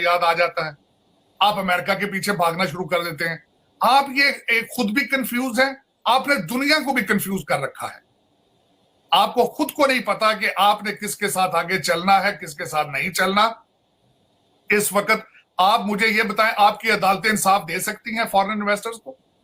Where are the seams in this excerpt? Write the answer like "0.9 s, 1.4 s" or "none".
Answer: none